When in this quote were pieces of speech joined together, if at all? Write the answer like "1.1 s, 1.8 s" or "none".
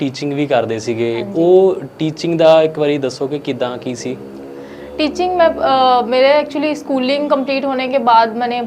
none